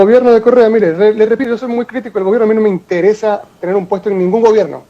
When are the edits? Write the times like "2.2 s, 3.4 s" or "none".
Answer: 1.4 s

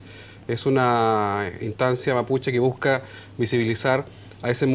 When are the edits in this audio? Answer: none

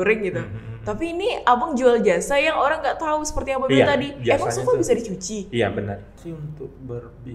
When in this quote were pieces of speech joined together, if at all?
6.3 s

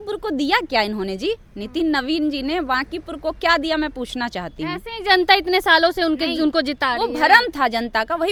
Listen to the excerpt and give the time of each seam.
none

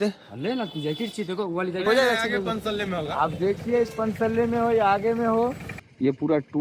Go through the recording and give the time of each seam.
1.9 s, 5.7 s

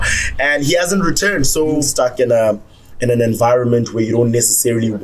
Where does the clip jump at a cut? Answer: 1.9 s

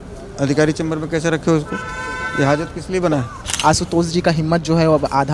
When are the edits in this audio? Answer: 3.4 s

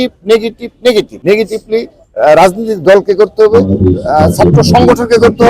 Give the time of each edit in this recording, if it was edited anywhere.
1.1 s

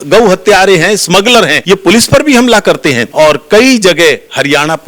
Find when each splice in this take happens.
1.6 s, 3.0 s

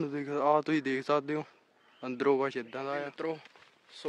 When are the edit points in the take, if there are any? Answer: 3.1 s

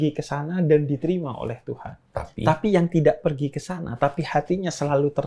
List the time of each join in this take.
none

